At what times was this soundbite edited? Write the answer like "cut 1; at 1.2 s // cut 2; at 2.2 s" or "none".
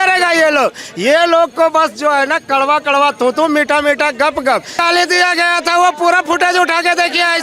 cut 1; at 4.8 s